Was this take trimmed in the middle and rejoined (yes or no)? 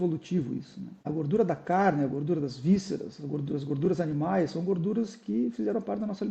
yes